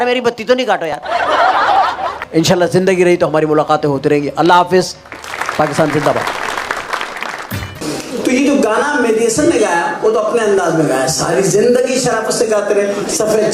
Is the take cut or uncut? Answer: uncut